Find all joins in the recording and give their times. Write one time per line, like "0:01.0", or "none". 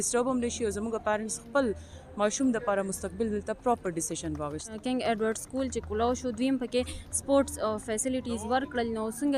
0:04.8